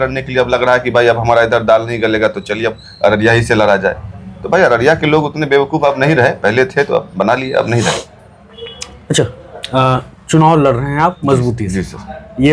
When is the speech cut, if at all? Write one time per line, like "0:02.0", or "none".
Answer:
none